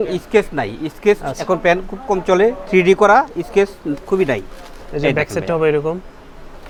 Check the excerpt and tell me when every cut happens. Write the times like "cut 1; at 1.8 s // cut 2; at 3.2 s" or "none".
none